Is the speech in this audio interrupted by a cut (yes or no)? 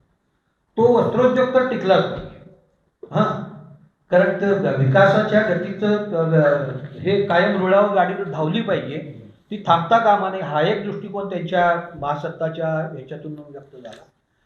no